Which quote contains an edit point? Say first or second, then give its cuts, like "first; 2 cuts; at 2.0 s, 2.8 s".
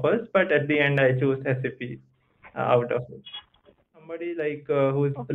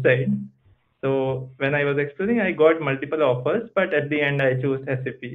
first; 1 cut; at 4.2 s